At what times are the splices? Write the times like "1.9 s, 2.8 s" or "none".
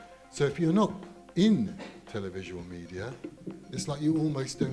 none